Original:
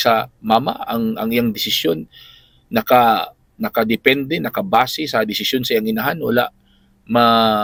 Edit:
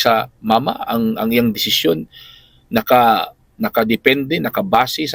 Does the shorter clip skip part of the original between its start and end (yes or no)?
no